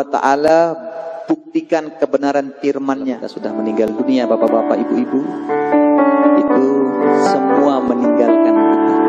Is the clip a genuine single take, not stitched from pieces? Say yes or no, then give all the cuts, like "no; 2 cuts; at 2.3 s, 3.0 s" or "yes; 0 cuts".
no; 1 cut; at 3.4 s